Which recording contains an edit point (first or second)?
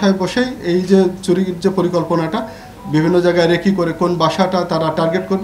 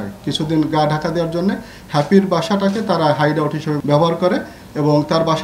second